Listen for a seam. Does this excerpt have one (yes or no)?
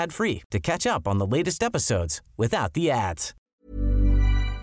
yes